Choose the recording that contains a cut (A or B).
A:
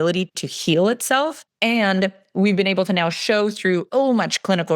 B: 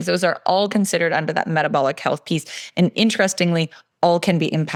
A